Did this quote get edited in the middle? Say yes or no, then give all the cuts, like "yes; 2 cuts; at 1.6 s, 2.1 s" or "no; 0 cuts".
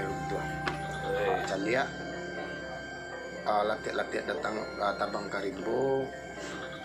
yes; 1 cut; at 1.5 s